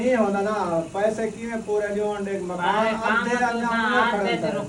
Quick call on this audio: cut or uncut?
uncut